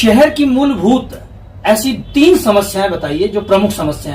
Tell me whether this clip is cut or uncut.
uncut